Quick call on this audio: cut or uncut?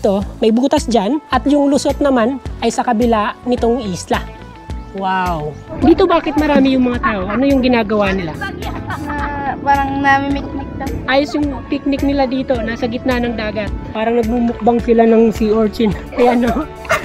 cut